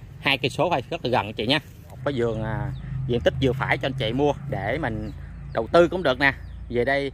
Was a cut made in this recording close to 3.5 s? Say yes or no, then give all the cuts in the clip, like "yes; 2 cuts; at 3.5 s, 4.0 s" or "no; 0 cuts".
no; 1 cut; at 2.0 s